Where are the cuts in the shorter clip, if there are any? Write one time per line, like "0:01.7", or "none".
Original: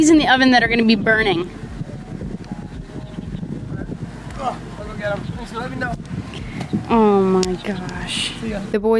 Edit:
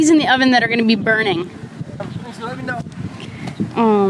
0:02.0